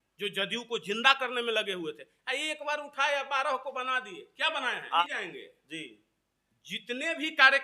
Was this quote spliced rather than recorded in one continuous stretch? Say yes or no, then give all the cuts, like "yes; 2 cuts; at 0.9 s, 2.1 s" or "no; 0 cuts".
yes; 1 cut; at 5.0 s